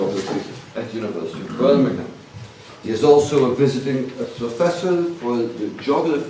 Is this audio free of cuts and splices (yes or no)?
yes